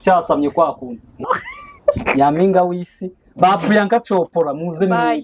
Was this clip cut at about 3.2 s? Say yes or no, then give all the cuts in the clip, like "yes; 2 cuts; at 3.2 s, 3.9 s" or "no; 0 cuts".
no; 1 cut; at 1.2 s